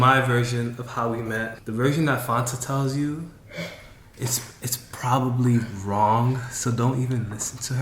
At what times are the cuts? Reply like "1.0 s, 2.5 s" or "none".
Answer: 1.6 s